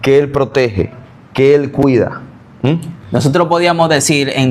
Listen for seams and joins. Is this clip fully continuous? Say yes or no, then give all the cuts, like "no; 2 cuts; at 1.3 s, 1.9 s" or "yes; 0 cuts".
yes; 0 cuts